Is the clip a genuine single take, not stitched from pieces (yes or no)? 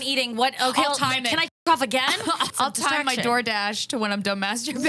no